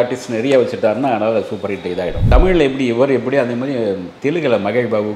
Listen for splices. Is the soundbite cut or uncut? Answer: cut